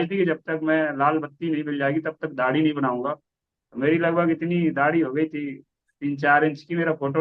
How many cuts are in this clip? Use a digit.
0